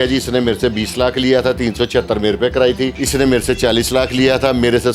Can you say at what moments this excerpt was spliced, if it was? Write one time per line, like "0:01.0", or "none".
0:03.0